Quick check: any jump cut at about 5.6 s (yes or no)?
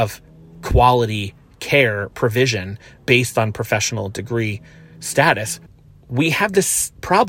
yes